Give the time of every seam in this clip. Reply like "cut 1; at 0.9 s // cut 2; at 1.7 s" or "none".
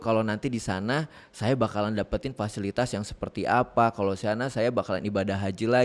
none